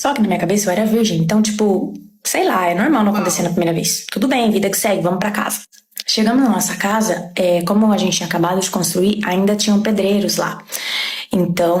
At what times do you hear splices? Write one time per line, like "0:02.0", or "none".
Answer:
none